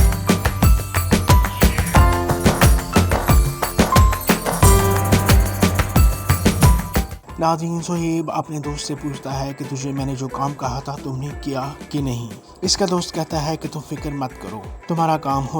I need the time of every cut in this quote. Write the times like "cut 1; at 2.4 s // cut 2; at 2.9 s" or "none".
cut 1; at 7.1 s